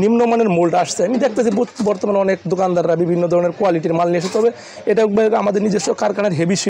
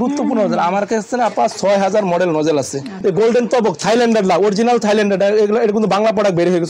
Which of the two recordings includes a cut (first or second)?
second